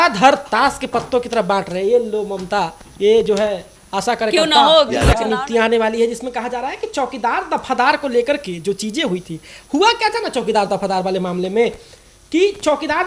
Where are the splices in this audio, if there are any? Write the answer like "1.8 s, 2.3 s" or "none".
5.1 s